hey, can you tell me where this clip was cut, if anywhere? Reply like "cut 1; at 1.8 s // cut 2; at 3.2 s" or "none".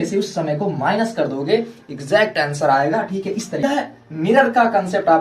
cut 1; at 3.6 s